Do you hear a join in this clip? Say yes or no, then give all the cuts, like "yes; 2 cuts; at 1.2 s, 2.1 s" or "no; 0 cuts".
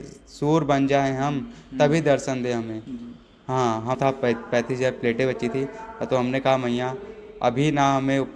yes; 1 cut; at 4.0 s